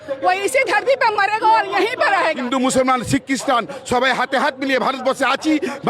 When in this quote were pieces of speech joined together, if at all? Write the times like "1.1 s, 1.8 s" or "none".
2.4 s